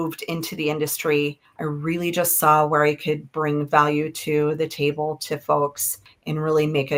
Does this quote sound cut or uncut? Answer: uncut